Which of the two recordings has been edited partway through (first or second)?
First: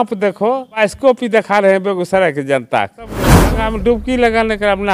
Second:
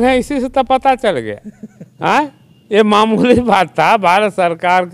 first